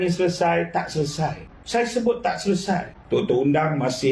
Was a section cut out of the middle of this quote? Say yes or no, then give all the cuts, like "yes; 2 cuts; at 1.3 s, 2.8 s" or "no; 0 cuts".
yes; 2 cuts; at 1.5 s, 2.9 s